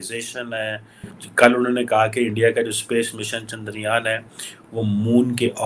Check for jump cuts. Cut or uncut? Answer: cut